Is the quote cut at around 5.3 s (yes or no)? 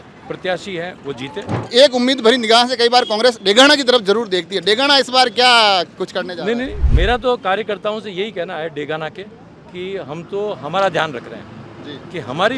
no